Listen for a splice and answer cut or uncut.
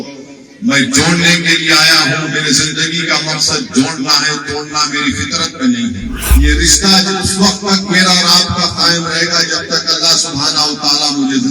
cut